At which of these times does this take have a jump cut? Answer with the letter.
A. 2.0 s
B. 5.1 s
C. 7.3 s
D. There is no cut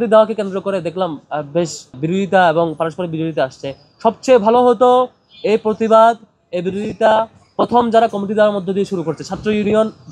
A